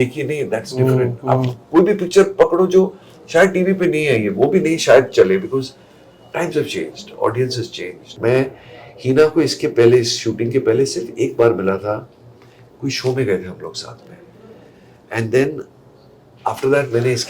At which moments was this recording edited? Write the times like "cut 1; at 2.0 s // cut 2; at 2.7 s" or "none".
cut 1; at 8.1 s